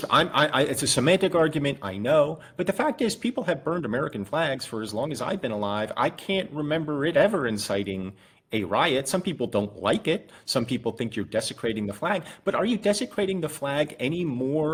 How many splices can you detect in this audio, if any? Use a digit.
0